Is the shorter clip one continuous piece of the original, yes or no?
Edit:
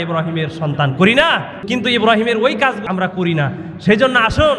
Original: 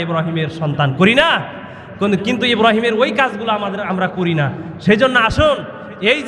no